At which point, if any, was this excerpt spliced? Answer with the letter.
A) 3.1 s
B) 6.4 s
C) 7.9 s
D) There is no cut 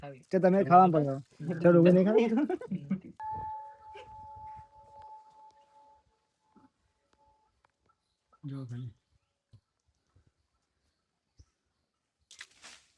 A